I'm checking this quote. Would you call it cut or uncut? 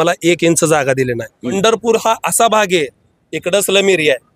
cut